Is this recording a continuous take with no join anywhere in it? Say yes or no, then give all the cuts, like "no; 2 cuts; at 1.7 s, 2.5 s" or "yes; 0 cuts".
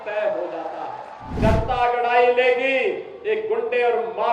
no; 1 cut; at 1.3 s